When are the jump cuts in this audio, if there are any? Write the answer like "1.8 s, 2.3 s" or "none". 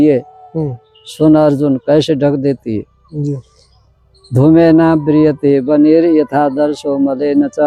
none